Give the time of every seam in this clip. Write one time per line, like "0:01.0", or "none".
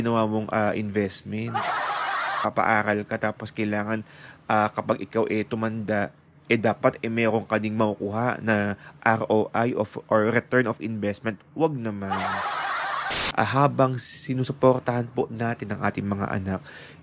0:02.4
0:13.0